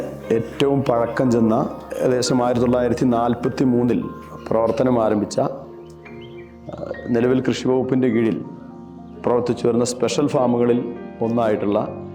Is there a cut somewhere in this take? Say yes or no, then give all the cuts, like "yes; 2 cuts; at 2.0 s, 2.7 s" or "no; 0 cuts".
yes; 1 cut; at 1.8 s